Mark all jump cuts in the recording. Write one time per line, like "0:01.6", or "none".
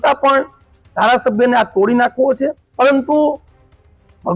0:02.6